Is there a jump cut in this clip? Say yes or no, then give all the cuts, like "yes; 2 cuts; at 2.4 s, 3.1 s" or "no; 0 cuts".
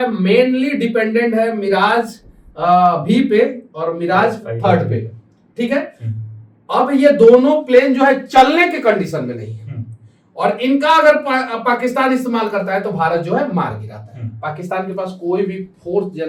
no; 0 cuts